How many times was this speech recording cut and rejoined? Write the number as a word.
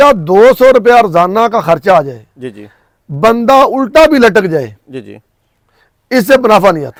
zero